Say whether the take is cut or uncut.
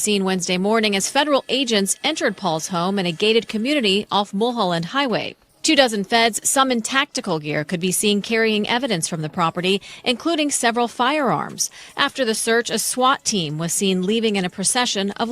cut